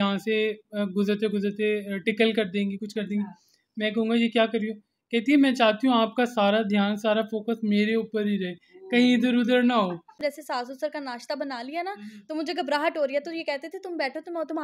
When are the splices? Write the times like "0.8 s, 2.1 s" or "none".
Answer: 10.2 s